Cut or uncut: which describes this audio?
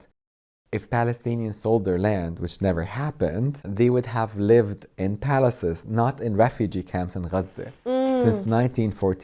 uncut